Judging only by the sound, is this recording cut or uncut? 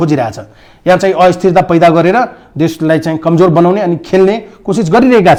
uncut